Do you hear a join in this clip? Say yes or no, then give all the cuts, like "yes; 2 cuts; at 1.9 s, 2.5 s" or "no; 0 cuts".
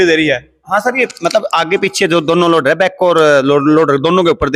no; 0 cuts